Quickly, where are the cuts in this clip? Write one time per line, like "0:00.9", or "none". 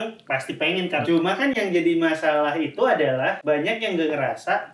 0:01.0
0:03.4